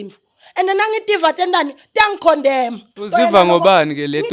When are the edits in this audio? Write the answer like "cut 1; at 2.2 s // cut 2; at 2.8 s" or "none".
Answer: cut 1; at 2.9 s